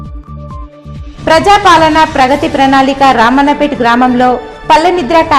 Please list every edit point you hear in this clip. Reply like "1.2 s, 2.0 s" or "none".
1.1 s